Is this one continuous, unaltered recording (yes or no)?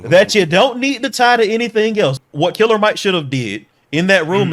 no